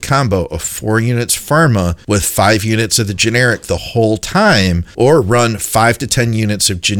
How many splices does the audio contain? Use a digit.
2